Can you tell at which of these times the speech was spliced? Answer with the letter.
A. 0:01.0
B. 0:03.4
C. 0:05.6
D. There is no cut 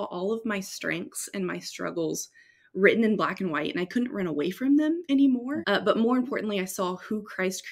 C